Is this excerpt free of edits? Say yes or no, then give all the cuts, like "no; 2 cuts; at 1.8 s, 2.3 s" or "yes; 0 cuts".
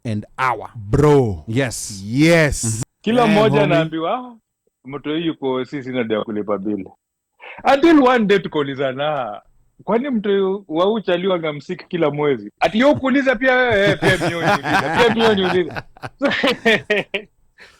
no; 1 cut; at 2.7 s